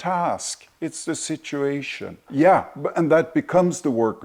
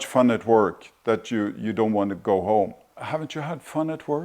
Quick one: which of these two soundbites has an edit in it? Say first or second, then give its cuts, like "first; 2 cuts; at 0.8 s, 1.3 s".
second; 1 cut; at 2.8 s